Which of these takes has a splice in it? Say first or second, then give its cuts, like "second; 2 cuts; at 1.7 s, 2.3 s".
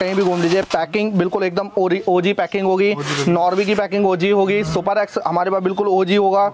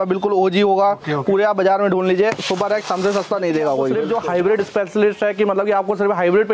second; 1 cut; at 3.9 s